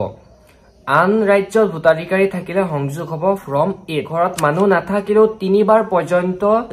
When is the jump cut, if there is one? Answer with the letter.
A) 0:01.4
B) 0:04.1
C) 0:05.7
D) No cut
B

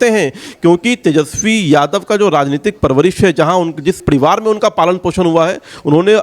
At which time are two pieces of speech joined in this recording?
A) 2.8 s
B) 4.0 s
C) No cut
B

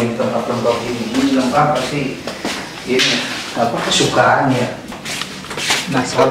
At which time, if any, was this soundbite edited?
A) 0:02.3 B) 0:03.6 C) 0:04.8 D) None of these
C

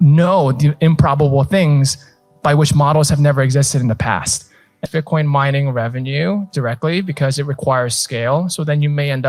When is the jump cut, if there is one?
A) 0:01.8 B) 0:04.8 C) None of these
B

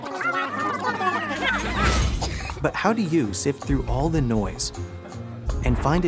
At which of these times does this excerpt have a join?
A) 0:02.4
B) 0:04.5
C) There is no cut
A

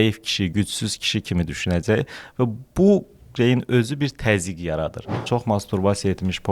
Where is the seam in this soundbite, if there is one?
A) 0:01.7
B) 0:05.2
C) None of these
B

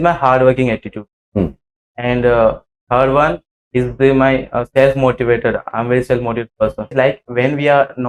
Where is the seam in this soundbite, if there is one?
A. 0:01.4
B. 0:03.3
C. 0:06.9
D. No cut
C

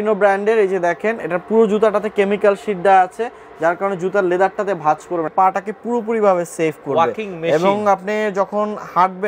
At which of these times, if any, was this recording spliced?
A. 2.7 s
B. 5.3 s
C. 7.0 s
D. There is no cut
B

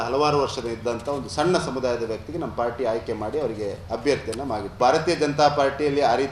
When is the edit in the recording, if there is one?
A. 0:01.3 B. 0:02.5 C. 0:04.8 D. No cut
C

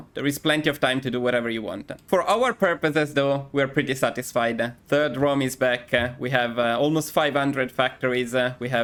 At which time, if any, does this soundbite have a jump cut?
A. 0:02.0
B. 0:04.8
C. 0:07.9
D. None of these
D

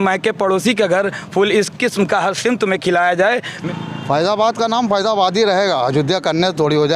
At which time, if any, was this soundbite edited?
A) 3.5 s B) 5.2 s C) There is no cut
A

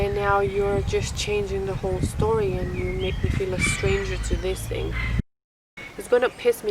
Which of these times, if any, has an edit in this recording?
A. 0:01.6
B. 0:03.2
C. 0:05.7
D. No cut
C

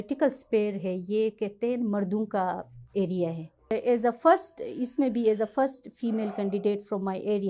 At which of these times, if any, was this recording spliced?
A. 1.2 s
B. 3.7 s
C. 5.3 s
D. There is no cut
B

